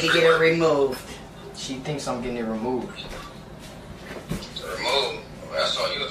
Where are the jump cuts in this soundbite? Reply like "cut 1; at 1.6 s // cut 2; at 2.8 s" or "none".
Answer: none

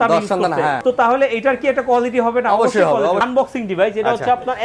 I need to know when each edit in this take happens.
cut 1; at 0.8 s // cut 2; at 3.2 s

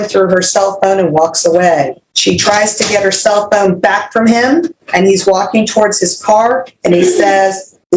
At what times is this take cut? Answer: cut 1; at 2.0 s // cut 2; at 4.8 s

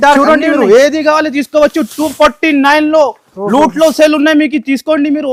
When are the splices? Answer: none

